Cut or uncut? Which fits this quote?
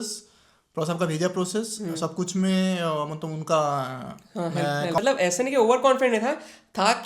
cut